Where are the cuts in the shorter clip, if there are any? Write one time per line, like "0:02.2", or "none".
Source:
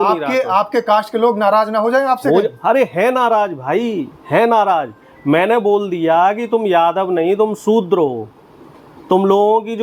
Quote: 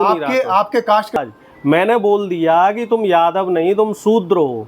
0:01.2